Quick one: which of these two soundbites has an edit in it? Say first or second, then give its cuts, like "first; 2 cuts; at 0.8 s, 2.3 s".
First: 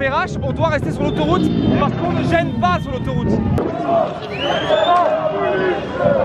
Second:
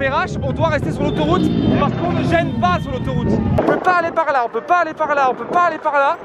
second; 1 cut; at 3.6 s